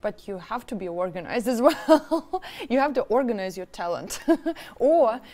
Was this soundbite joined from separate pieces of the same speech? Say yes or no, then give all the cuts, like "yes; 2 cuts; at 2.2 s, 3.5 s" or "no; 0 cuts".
no; 0 cuts